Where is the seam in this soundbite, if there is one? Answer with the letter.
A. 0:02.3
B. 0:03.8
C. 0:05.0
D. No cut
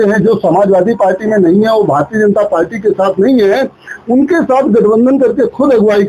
D